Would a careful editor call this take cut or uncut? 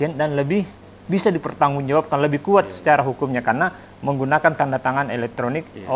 uncut